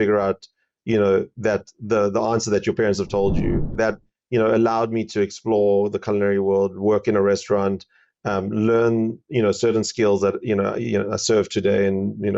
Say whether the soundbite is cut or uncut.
cut